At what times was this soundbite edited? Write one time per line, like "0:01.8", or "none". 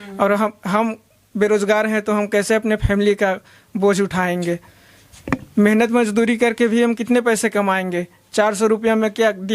none